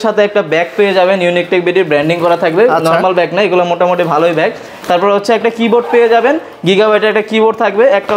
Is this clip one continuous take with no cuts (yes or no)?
yes